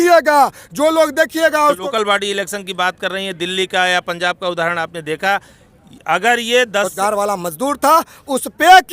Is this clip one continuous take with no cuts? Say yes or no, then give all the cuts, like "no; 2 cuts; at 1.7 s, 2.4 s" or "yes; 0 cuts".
no; 2 cuts; at 1.8 s, 6.9 s